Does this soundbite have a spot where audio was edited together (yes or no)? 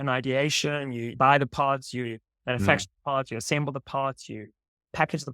yes